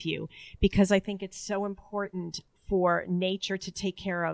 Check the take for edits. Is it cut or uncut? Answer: cut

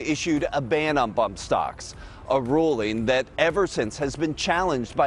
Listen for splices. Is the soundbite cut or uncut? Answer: uncut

